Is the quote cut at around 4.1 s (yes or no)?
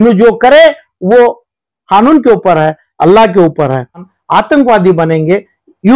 yes